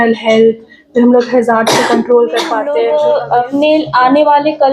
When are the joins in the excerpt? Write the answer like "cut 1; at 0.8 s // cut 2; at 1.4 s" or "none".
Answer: cut 1; at 2.8 s